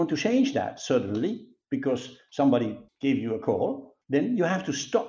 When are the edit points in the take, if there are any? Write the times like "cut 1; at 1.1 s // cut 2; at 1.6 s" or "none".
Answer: none